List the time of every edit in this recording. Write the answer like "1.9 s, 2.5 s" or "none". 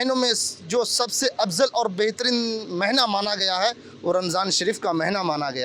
none